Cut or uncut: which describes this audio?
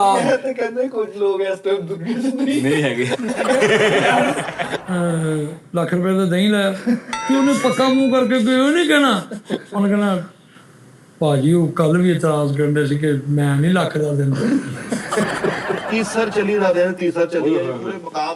cut